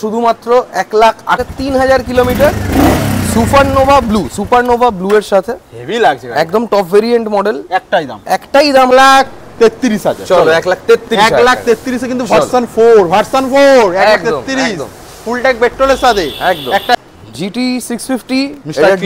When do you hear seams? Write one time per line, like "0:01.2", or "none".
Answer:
0:01.5
0:08.9
0:16.9